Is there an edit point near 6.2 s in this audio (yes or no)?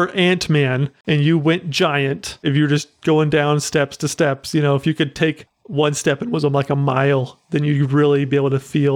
no